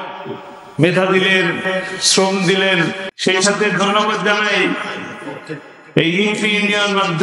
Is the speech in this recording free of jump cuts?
no; 1 cut; at 3.1 s

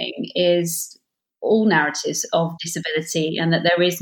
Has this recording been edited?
no; 0 cuts

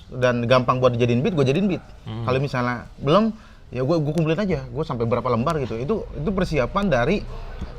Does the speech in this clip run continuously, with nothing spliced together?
yes; 0 cuts

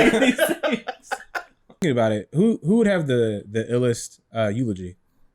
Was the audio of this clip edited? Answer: yes; 1 cut; at 1.8 s

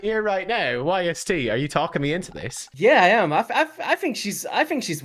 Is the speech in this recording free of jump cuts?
no; 1 cut; at 2.8 s

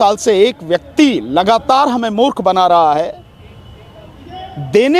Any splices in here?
no; 0 cuts

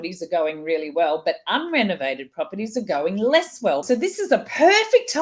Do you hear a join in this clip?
yes; 1 cut; at 3.8 s

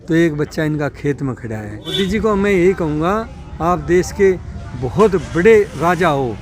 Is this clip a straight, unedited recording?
no; 1 cut; at 1.9 s

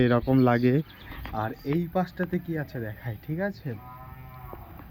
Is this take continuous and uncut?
yes; 0 cuts

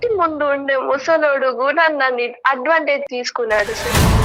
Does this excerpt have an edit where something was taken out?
yes; 1 cut; at 3.1 s

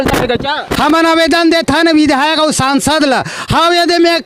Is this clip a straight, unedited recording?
yes; 0 cuts

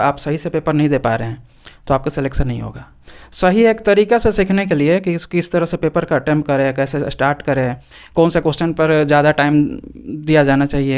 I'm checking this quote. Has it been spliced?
no; 0 cuts

